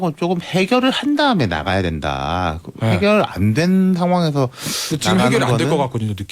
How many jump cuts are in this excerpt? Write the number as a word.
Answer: zero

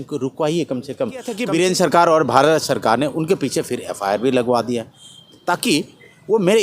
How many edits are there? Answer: one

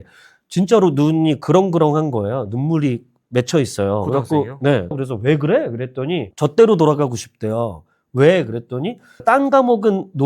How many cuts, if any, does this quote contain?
two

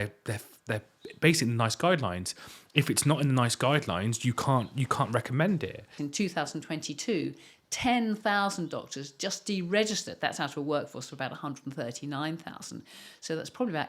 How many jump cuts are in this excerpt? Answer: one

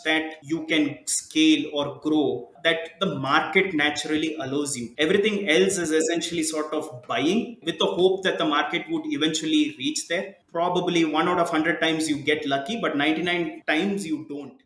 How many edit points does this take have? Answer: one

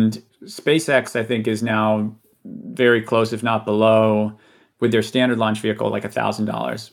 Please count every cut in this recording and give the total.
zero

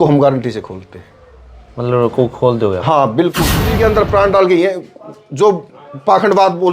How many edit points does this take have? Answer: one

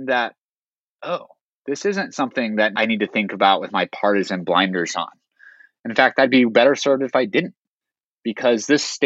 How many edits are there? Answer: one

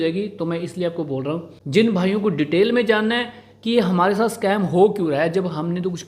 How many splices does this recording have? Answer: one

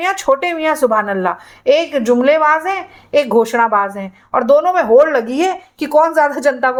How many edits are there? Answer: zero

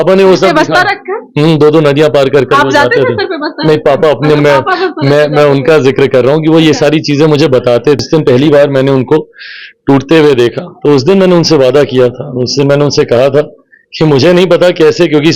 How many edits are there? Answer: one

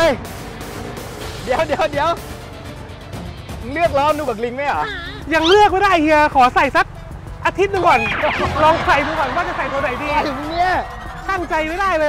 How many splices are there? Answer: zero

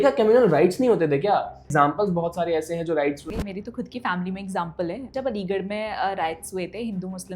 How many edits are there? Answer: three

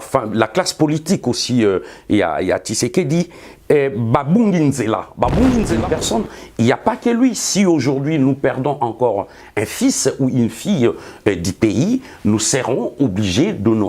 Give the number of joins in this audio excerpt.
one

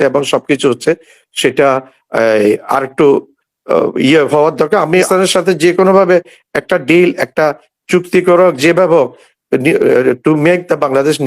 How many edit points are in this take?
one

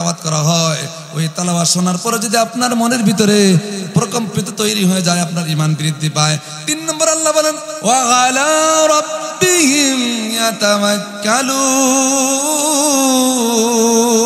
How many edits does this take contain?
one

